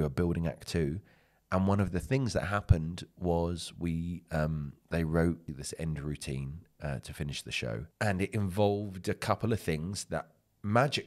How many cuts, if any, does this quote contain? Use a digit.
2